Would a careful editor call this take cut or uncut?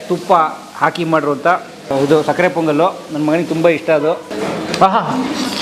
cut